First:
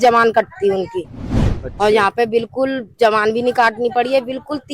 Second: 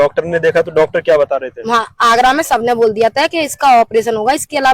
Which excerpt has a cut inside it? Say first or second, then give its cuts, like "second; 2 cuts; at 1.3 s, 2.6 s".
first; 1 cut; at 1.3 s